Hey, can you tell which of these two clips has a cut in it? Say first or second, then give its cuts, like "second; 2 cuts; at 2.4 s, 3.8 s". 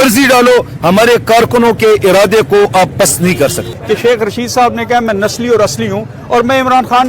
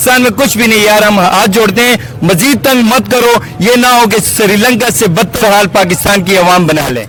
first; 1 cut; at 3.7 s